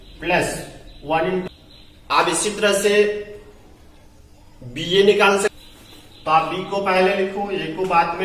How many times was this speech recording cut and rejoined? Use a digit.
2